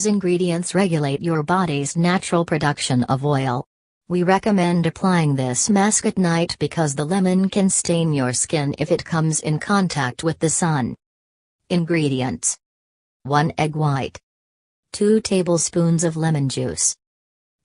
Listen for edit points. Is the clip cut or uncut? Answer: uncut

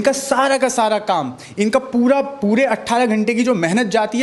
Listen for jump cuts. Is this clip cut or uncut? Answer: uncut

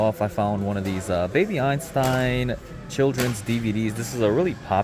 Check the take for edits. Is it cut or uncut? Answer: uncut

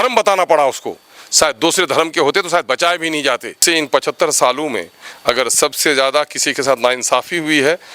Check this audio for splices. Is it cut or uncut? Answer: cut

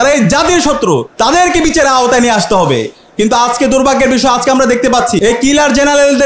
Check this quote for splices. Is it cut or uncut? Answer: cut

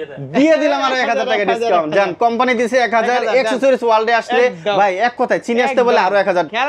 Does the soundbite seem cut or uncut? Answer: uncut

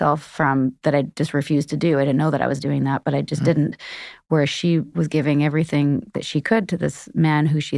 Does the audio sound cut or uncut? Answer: uncut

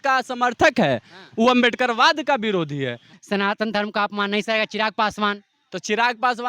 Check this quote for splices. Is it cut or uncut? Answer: cut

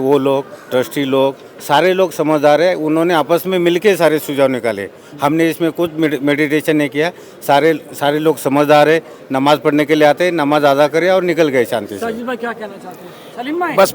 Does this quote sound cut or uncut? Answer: uncut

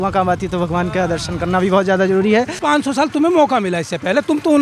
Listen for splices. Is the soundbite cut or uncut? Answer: cut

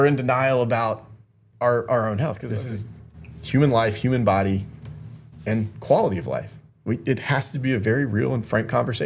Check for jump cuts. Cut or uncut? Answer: cut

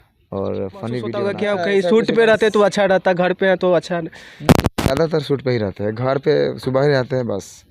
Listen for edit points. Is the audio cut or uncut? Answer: cut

